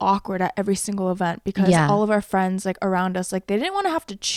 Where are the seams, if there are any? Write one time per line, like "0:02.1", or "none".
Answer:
none